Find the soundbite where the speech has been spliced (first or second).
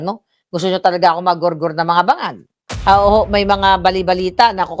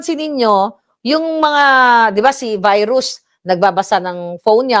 first